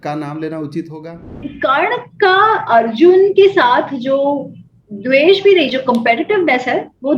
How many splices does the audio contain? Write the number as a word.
one